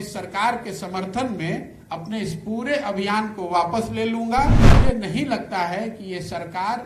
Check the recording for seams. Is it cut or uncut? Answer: cut